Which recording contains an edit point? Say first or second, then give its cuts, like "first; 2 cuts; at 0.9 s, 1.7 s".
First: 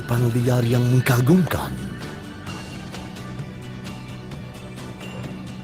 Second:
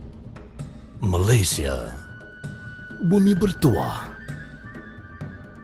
first; 1 cut; at 4.4 s